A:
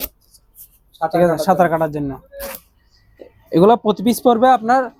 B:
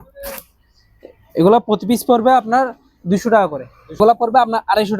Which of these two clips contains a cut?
B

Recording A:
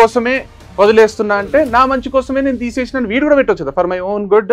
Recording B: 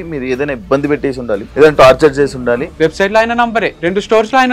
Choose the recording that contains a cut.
B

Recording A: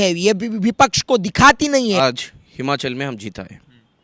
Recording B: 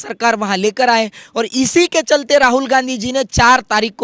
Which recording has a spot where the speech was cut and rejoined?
A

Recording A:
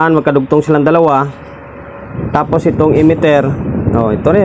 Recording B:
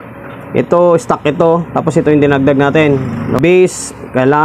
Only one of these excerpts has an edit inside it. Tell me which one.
B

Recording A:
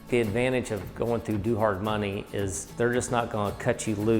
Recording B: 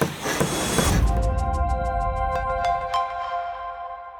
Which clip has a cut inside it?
A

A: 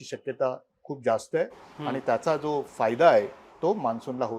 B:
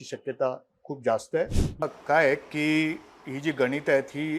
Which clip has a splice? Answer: B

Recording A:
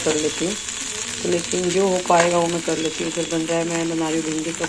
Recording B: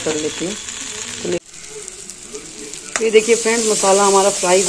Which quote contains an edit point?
B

